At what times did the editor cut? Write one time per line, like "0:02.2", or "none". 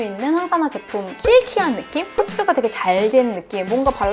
0:01.2